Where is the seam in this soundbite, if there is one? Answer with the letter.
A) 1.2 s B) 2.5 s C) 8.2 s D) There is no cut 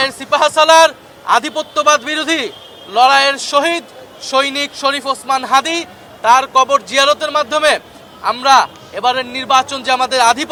D